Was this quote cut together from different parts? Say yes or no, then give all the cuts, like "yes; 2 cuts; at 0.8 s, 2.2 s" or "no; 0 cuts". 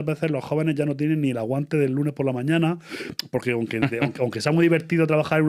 no; 0 cuts